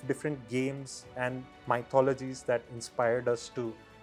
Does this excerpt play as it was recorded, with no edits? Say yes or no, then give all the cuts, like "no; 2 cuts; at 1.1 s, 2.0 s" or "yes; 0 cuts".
yes; 0 cuts